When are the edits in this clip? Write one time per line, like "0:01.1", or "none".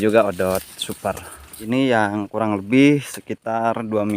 0:01.5